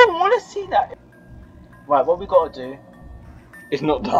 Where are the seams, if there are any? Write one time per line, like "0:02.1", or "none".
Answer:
0:00.9